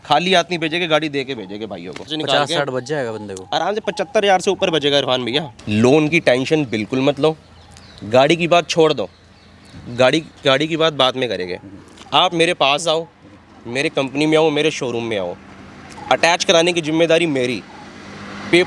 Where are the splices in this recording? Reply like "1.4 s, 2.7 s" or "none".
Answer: 2.1 s, 5.6 s